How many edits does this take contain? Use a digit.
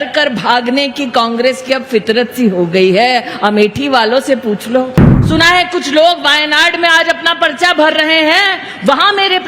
1